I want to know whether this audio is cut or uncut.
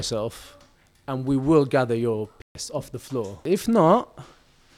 cut